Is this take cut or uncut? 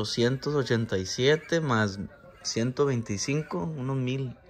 uncut